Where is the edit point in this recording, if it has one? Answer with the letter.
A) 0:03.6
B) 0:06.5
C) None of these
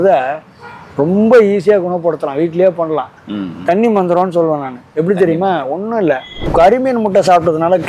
B